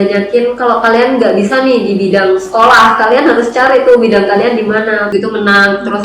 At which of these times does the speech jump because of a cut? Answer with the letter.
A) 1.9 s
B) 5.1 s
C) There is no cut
B